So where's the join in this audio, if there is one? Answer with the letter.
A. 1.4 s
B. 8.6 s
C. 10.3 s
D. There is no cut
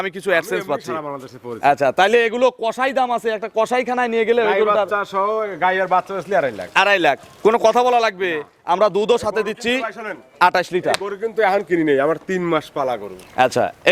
D